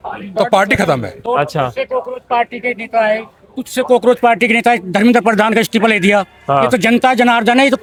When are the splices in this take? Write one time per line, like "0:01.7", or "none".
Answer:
none